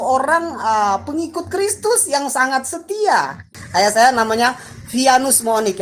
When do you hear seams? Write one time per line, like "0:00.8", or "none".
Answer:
0:03.5